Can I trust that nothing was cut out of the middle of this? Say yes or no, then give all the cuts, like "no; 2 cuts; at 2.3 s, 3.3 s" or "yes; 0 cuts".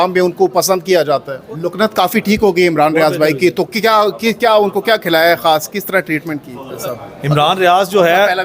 no; 2 cuts; at 1.4 s, 6.8 s